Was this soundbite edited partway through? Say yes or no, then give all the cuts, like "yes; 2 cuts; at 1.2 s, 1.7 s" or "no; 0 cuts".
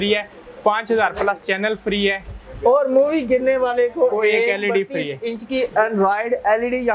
no; 0 cuts